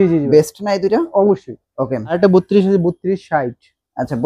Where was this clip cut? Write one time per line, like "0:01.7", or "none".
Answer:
0:02.2